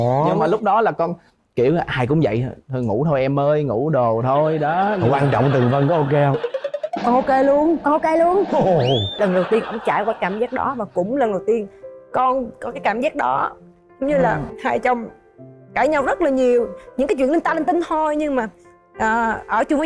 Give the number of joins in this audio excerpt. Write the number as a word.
one